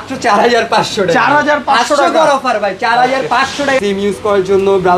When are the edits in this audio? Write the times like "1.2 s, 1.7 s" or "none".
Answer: 3.8 s